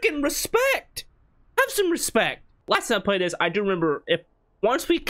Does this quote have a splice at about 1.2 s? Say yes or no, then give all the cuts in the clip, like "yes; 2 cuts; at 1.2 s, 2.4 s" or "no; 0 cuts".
no; 1 cut; at 2.5 s